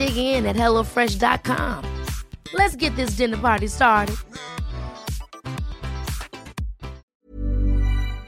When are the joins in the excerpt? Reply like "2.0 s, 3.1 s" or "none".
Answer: 7.0 s